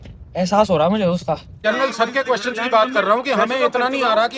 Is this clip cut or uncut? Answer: cut